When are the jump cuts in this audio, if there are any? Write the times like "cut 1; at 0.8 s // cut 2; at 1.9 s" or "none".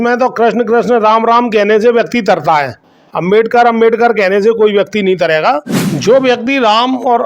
cut 1; at 5.7 s